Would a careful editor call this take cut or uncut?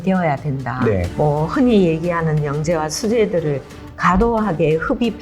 cut